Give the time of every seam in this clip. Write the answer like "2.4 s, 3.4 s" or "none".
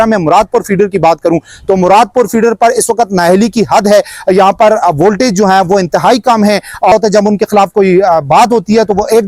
6.9 s